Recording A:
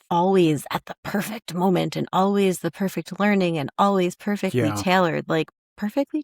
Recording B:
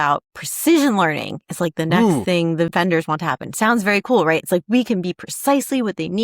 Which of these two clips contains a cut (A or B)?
B